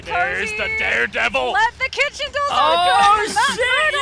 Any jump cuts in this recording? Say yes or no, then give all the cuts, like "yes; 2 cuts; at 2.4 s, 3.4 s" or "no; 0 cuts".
no; 0 cuts